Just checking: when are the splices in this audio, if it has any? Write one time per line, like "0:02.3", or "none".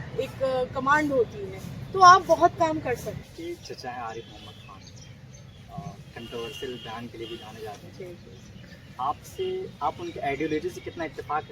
0:03.3